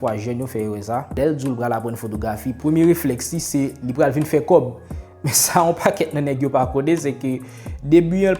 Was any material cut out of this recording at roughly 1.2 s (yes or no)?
yes